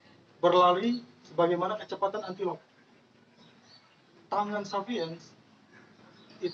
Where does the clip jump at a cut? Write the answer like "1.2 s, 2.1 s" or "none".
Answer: none